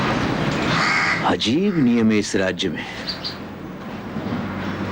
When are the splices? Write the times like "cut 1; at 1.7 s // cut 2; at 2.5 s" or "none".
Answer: none